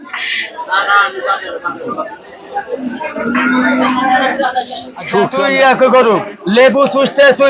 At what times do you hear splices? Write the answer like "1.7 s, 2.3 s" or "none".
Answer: 5.3 s